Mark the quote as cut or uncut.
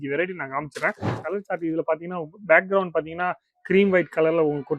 cut